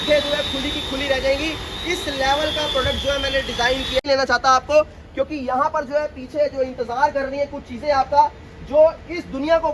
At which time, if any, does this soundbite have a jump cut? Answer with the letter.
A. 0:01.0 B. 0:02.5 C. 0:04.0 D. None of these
C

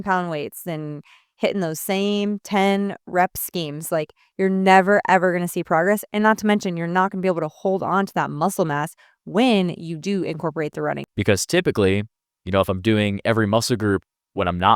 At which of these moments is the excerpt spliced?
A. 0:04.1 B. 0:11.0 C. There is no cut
B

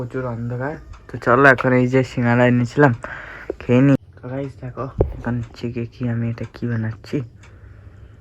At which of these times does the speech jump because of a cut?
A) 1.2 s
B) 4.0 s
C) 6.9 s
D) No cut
B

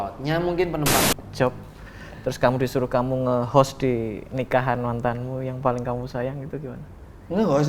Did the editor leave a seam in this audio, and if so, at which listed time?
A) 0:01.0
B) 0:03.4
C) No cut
A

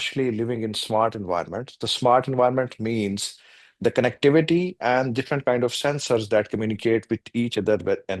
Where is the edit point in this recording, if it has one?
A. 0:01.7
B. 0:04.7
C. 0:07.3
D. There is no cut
D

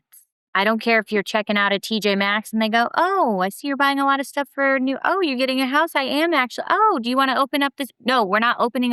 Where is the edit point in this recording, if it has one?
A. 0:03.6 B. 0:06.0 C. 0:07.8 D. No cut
D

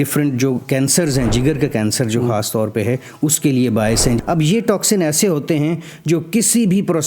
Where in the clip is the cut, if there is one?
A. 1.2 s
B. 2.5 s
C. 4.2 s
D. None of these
C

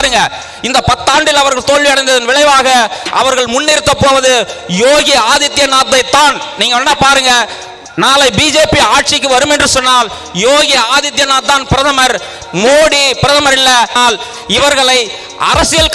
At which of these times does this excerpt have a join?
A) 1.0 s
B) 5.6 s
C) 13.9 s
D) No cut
C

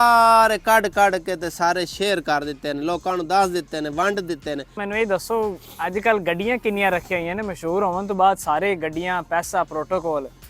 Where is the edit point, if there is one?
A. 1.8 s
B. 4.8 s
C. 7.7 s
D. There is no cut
B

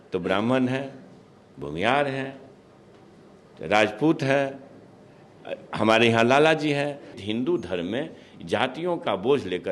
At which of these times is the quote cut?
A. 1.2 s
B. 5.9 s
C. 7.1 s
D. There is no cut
C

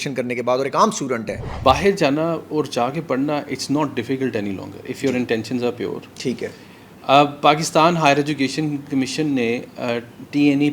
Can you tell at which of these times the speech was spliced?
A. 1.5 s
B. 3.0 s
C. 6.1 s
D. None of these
A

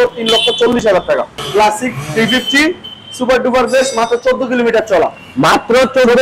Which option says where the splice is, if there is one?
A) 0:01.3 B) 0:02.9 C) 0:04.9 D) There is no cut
A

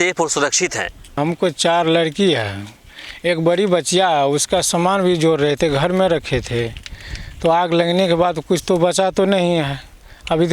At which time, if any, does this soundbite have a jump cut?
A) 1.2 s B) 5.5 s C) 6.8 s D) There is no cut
A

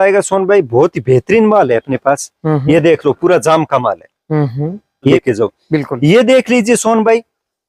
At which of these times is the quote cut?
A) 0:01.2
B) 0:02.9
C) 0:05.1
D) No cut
C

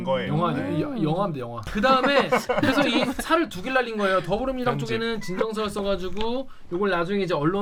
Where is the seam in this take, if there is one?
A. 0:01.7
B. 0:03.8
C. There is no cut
C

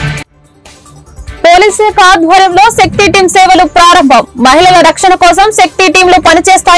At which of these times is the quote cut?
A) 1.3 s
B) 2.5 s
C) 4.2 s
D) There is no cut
A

